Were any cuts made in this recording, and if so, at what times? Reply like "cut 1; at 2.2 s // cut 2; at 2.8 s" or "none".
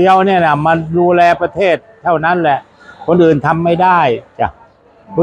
none